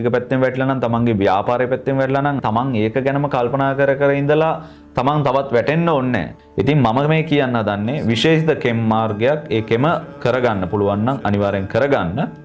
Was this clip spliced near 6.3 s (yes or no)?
yes